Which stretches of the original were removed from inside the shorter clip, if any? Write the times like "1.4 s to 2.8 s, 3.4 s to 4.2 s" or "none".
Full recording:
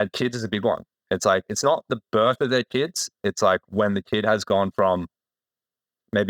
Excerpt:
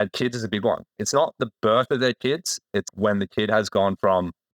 1.0 s to 1.5 s, 3.4 s to 3.6 s